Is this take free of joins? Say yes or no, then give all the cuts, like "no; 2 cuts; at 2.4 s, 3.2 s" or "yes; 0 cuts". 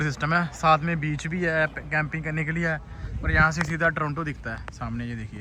yes; 0 cuts